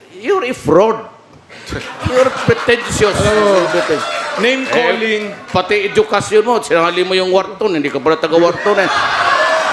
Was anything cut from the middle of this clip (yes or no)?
no